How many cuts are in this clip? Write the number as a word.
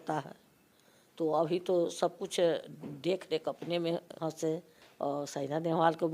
one